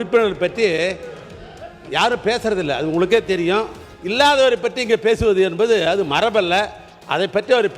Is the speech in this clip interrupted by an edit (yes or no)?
yes